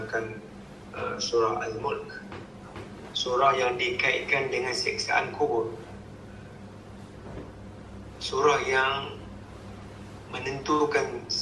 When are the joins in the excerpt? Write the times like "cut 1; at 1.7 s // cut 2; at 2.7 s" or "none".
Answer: none